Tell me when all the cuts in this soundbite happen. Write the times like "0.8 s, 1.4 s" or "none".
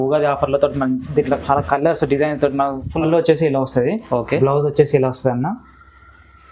3.1 s